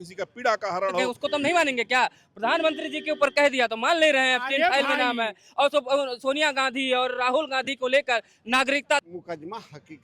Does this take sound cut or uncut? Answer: cut